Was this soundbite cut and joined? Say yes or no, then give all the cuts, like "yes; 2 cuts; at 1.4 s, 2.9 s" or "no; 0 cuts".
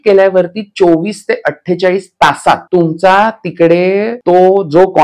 yes; 2 cuts; at 2.6 s, 4.1 s